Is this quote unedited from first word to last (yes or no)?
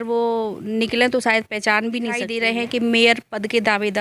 no